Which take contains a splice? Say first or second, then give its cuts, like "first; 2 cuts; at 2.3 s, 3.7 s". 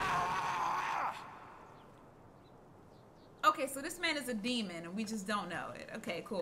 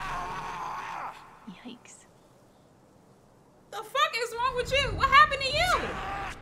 first; 1 cut; at 1.3 s